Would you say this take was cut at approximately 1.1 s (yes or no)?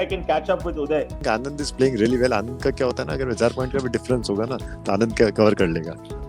no